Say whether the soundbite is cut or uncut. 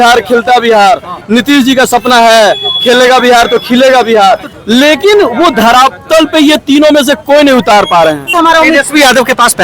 cut